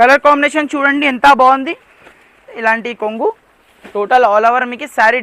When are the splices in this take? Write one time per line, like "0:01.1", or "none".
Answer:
0:02.4